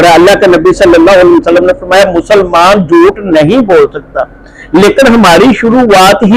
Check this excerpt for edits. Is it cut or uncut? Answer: uncut